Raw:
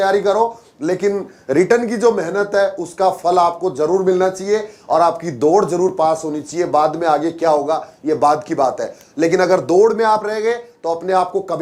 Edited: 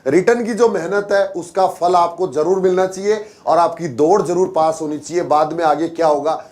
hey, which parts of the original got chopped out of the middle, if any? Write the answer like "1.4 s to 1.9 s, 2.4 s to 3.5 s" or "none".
none